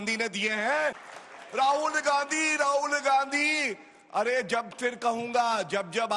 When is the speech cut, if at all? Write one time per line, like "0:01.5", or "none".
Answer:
0:01.1